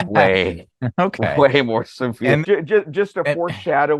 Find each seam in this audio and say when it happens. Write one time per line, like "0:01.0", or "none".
0:02.4